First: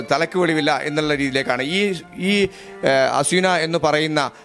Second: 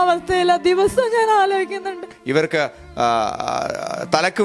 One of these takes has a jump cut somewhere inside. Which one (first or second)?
second